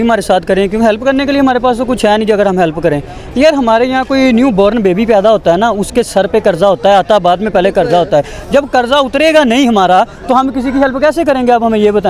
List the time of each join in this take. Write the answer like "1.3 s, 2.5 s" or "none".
none